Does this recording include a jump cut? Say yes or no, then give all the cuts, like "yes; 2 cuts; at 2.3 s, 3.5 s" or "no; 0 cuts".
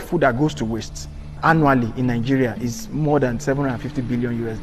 yes; 1 cut; at 1.4 s